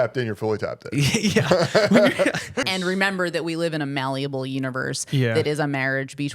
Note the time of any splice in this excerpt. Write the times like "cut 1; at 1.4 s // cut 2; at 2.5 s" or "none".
cut 1; at 2.6 s